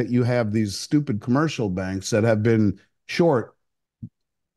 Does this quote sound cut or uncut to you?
uncut